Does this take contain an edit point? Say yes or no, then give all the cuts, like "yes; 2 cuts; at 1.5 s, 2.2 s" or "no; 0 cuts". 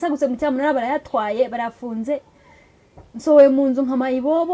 no; 0 cuts